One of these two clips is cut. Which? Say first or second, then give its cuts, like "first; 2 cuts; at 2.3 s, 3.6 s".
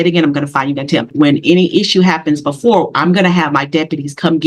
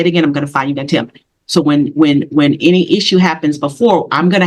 first; 1 cut; at 1.1 s